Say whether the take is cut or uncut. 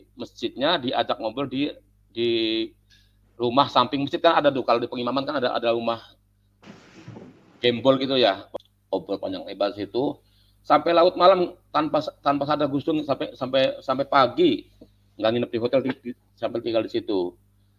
cut